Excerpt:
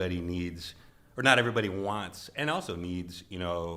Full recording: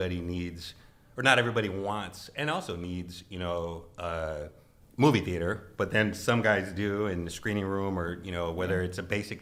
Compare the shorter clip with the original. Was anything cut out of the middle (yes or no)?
no